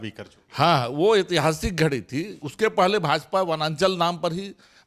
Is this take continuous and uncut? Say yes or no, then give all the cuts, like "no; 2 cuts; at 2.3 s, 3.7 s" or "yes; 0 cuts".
yes; 0 cuts